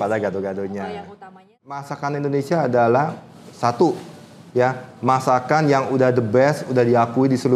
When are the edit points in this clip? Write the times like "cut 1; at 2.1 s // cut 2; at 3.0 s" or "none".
cut 1; at 1.9 s